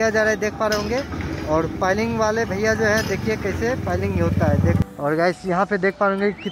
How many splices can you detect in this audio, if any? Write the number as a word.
one